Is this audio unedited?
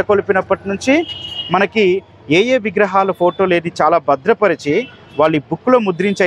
yes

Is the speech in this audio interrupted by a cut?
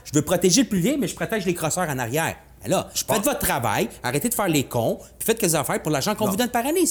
no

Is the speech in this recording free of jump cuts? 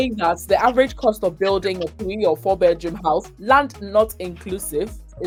yes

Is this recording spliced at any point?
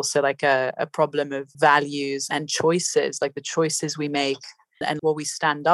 yes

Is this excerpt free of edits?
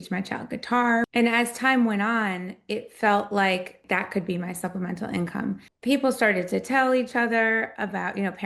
no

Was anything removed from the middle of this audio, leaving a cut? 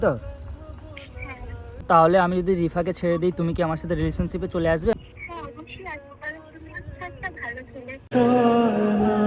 yes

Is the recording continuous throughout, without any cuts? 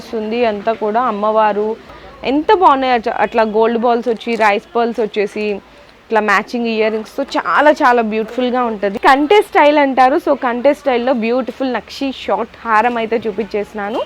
no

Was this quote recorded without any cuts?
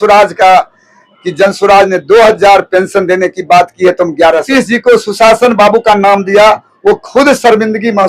no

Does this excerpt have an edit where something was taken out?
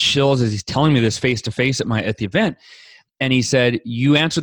no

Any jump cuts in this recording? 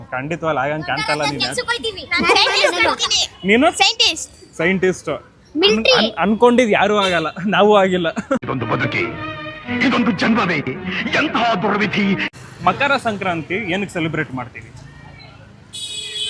yes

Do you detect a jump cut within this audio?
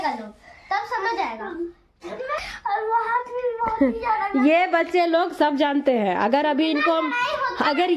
yes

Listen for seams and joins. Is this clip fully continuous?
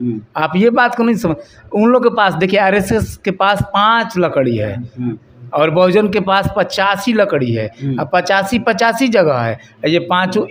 yes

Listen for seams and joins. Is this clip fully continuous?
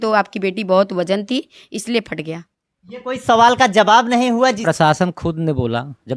no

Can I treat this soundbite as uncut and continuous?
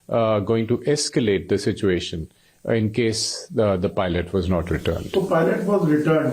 yes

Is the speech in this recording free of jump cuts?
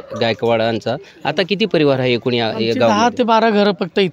yes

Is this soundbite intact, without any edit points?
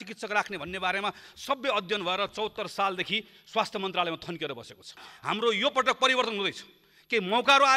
no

